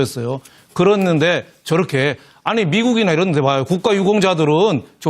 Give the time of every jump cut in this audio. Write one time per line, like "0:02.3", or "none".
0:02.9